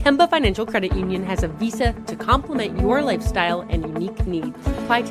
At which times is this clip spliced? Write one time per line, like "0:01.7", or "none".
none